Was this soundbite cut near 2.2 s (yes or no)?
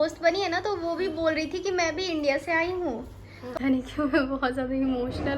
no